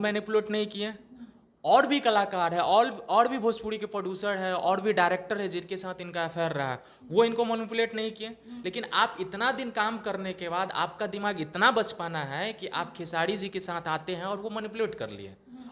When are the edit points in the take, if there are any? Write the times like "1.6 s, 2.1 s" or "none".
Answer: none

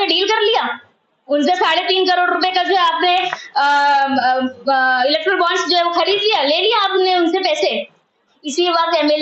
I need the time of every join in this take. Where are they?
8.3 s

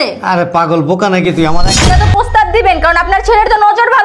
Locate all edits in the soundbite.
1.8 s

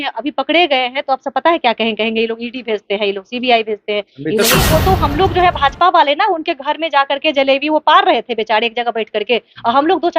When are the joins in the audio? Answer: 4.5 s

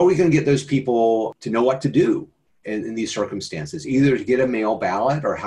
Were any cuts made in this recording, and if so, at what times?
1.4 s

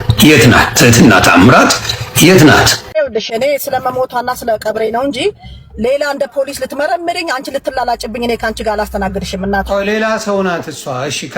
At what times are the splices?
2.8 s

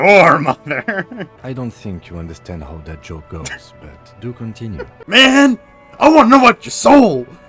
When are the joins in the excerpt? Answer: 1.3 s, 5.0 s

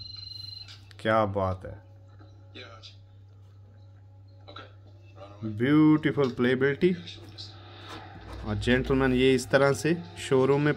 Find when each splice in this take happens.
none

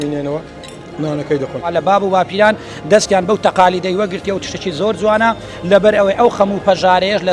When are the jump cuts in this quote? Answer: 1.7 s

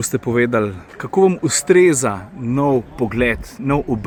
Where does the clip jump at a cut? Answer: none

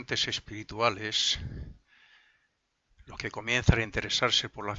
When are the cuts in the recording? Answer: none

